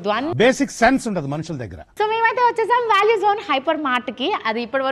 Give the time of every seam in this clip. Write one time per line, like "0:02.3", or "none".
none